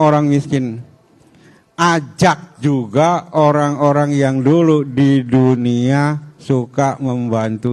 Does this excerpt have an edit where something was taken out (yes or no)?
no